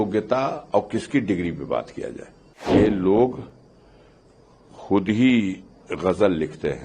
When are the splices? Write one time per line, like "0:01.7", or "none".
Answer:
0:02.7